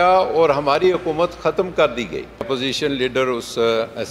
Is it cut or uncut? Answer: cut